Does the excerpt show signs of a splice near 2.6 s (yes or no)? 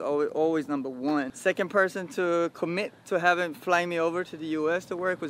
no